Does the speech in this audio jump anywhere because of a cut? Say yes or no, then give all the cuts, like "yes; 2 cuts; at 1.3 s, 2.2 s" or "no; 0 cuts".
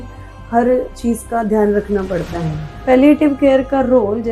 yes; 1 cut; at 2.8 s